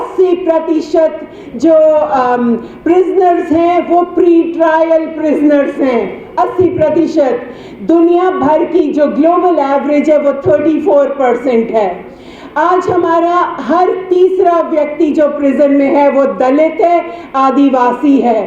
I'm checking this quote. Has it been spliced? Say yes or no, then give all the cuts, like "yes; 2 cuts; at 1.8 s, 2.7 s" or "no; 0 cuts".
no; 0 cuts